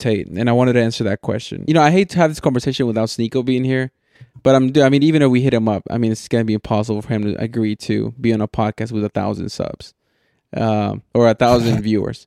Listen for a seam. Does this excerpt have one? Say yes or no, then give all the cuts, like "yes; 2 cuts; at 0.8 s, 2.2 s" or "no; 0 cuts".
yes; 1 cut; at 1.6 s